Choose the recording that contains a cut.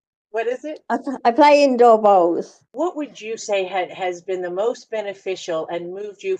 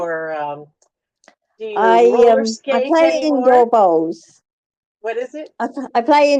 first; 1 cut; at 2.6 s

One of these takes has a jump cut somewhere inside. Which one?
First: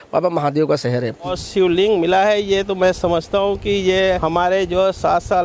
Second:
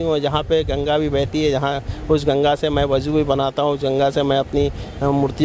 first; 2 cuts; at 1.3 s, 4.2 s

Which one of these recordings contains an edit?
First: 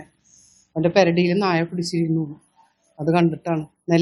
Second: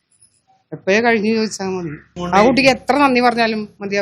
second; 1 cut; at 2.1 s

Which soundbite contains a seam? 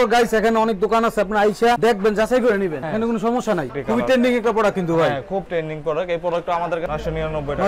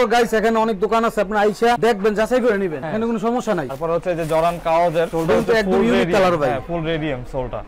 first; 2 cuts; at 3.7 s, 6.9 s

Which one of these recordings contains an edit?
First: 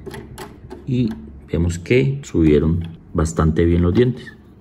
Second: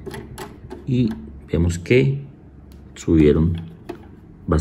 first; 2 cuts; at 2.2 s, 2.9 s

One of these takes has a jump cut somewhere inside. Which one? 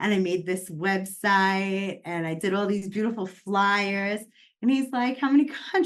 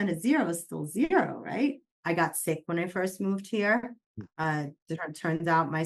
second; 1 cut; at 1.9 s

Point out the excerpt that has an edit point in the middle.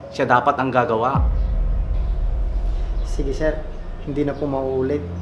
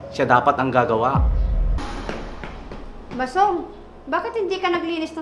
second; 1 cut; at 1.8 s

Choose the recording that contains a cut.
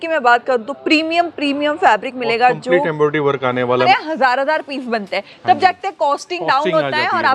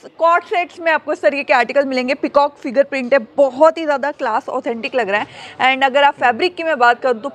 first; 1 cut; at 3.8 s

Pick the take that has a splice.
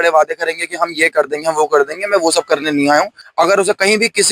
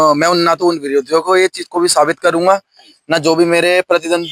first; 1 cut; at 3.2 s

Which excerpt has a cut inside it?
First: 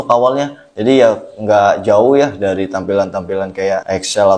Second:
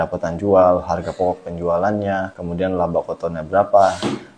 second; 1 cut; at 2.4 s

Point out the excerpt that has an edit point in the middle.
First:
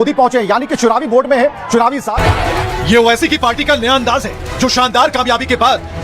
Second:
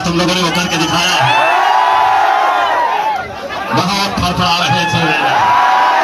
first; 1 cut; at 1.4 s

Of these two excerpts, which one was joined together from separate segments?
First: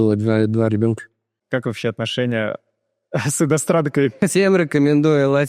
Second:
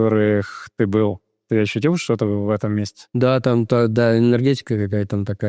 first; 1 cut; at 1.3 s

